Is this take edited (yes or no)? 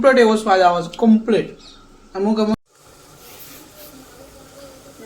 yes